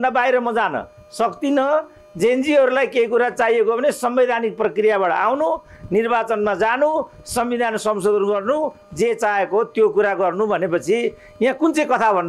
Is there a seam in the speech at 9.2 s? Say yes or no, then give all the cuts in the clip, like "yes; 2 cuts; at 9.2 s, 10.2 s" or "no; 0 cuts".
no; 0 cuts